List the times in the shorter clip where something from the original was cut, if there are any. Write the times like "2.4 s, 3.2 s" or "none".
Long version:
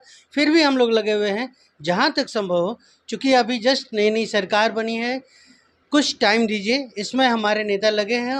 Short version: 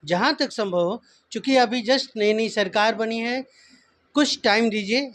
none